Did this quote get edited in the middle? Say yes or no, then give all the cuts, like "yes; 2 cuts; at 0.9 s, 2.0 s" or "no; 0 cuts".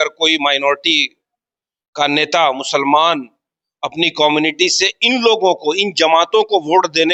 no; 0 cuts